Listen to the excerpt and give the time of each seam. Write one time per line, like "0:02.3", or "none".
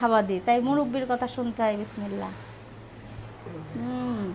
none